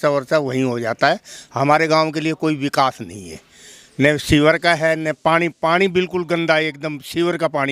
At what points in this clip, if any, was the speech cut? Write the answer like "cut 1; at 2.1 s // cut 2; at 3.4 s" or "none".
none